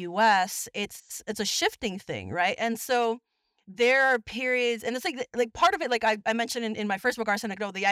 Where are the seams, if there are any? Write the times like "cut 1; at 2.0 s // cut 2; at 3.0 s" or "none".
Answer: none